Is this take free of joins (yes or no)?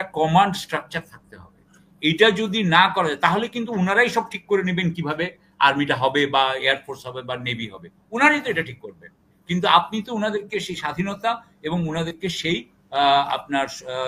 yes